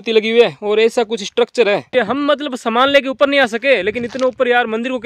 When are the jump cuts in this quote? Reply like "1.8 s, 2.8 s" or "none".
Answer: 1.9 s

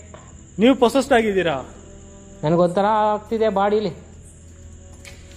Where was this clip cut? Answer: none

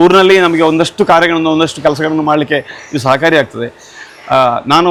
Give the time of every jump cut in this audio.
none

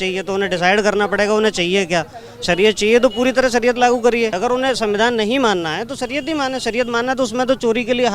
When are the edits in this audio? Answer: 4.4 s

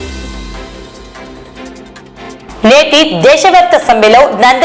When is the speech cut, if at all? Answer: none

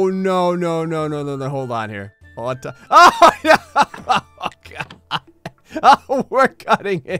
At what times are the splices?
none

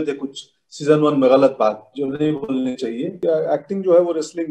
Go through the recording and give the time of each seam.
3.2 s

